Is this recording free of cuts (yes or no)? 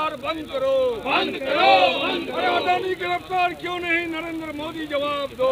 yes